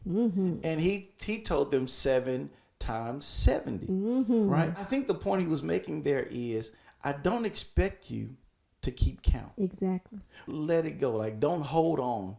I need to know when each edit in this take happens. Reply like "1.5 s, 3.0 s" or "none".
4.9 s